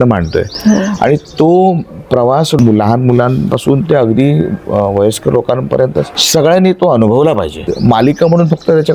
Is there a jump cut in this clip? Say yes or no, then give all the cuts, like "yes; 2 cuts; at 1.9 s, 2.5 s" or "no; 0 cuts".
yes; 3 cuts; at 2.6 s, 6.2 s, 7.6 s